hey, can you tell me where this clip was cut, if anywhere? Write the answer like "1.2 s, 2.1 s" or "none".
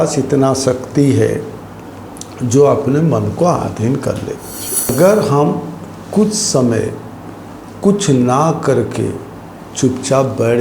4.9 s